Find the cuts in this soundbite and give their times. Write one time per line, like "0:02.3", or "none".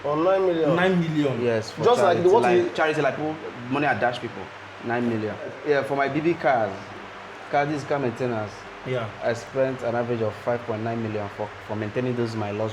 0:05.6